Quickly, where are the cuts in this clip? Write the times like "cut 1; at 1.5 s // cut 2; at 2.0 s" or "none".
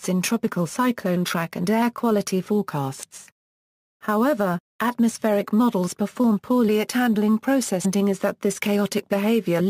none